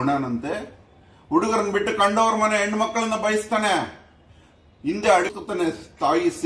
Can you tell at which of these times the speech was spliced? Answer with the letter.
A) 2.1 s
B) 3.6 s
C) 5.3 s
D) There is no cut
C